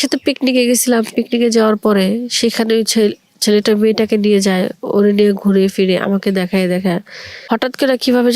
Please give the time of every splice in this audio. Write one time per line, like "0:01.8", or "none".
0:07.3